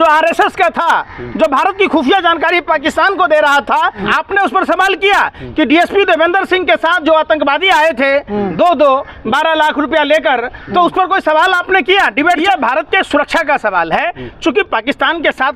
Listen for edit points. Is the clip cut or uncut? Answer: cut